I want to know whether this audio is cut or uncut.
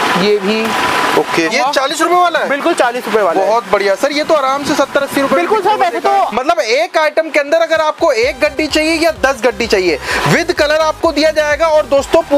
cut